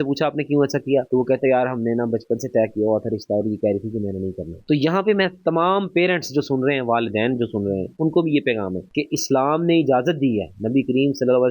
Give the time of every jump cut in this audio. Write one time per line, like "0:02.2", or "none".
0:08.8